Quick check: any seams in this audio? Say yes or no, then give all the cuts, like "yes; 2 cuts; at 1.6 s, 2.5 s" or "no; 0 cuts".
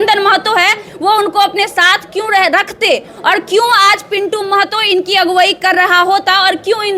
no; 0 cuts